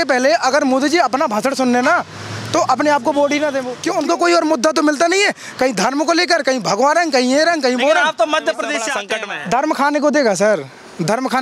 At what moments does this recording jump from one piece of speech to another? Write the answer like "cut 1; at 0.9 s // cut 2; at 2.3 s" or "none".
cut 1; at 3.7 s // cut 2; at 9.0 s

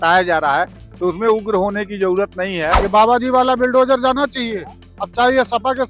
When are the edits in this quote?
cut 1; at 2.8 s

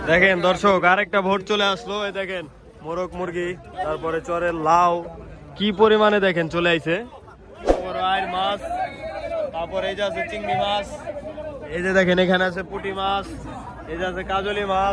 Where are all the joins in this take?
cut 1; at 7.7 s

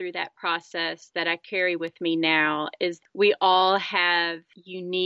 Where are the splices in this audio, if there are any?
cut 1; at 3.0 s

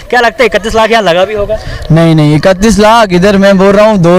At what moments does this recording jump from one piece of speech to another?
none

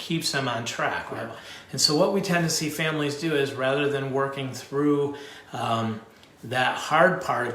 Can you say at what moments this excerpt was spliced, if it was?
cut 1; at 1.2 s

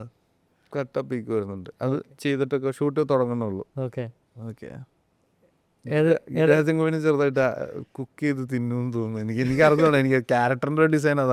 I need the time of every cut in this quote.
none

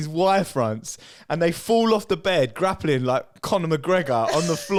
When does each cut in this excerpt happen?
none

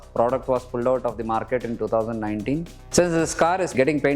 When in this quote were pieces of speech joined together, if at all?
cut 1; at 2.8 s

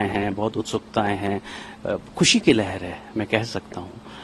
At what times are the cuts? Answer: none

